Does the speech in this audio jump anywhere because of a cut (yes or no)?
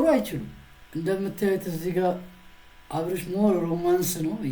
yes